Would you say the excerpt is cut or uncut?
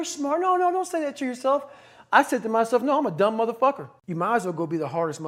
uncut